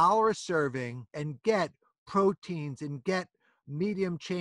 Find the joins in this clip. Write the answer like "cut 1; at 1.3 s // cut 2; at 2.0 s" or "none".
cut 1; at 1.1 s